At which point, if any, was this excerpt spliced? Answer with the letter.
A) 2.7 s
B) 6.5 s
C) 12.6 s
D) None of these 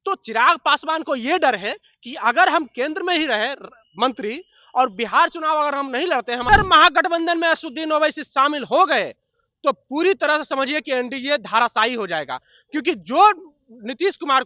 B